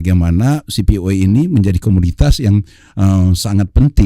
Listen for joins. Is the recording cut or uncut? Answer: uncut